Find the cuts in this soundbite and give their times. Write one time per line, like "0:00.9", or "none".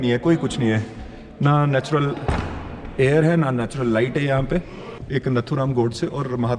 0:04.8